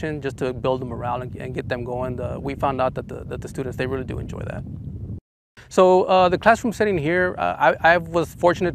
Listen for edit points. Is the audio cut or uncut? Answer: uncut